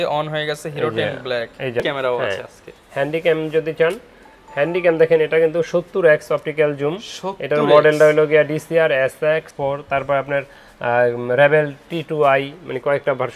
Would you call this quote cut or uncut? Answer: cut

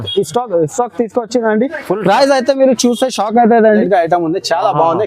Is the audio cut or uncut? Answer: cut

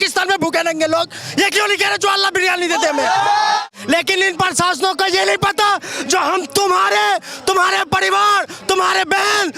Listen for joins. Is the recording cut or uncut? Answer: cut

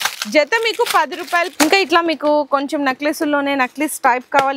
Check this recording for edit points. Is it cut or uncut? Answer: cut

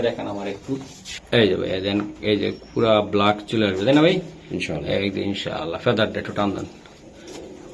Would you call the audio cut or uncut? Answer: uncut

